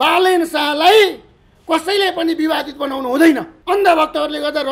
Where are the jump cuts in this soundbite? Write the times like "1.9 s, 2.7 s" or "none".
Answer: 3.5 s